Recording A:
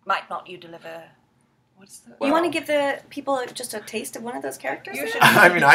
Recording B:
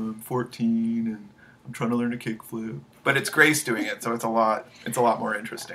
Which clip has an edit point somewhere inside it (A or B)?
A